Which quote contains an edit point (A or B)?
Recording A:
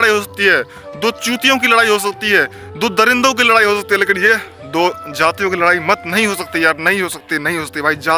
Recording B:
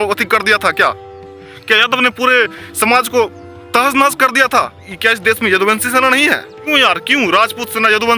B